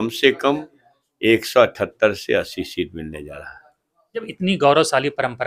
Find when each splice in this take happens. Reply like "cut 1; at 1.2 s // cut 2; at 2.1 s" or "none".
cut 1; at 4.2 s

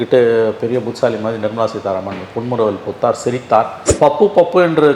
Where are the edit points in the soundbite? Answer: cut 1; at 3.9 s

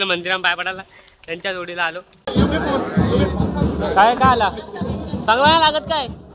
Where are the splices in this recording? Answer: cut 1; at 2.3 s

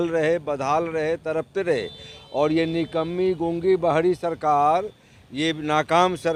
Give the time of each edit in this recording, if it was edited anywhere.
none

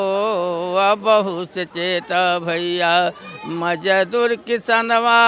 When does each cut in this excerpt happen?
none

